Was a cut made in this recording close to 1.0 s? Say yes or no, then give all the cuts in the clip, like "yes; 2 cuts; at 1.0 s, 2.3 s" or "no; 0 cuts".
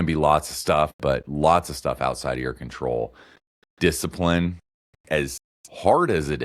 yes; 1 cut; at 1.0 s